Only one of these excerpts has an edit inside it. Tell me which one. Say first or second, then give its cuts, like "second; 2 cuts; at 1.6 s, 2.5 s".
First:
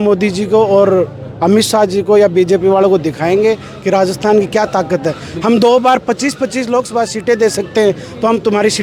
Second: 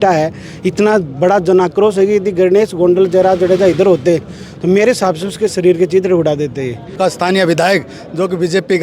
second; 1 cut; at 7.0 s